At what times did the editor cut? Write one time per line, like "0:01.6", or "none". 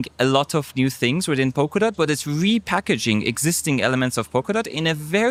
none